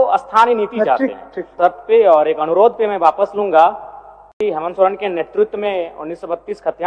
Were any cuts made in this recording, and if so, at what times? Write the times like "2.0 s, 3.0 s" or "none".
1.5 s, 4.4 s